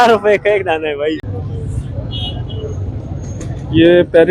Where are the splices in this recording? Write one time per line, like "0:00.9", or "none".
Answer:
0:01.3